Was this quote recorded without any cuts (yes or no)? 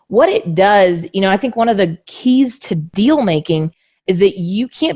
no